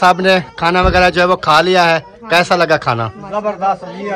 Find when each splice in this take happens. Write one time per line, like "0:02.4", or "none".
none